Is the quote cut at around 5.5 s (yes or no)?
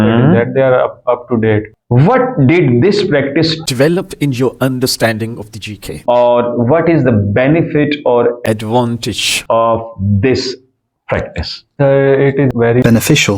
no